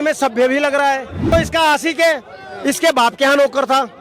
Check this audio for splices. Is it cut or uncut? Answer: cut